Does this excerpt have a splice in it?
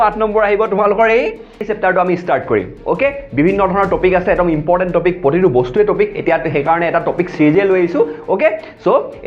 yes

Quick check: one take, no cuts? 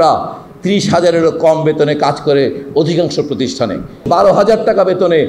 no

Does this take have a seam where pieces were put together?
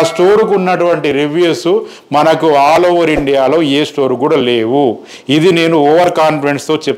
no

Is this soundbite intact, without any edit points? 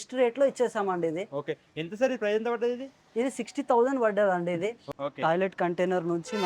no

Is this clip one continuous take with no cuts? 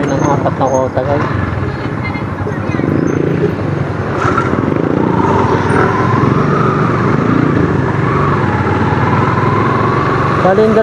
yes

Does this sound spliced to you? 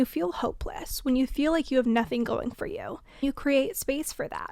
yes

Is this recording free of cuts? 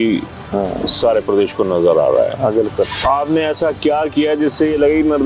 no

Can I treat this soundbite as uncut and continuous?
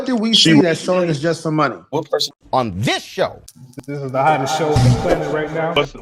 no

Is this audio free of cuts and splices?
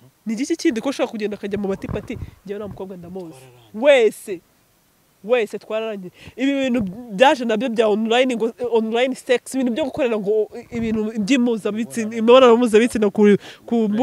yes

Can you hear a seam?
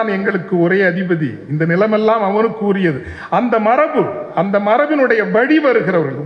no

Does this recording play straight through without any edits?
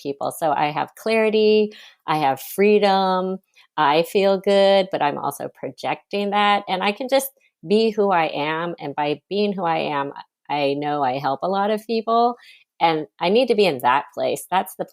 yes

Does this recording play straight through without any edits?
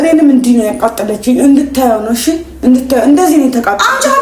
yes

